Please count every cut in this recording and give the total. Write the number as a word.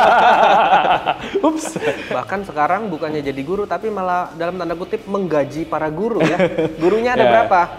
one